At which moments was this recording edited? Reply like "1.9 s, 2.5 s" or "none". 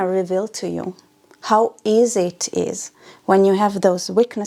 none